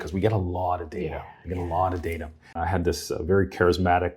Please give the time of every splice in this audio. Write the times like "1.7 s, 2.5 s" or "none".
2.5 s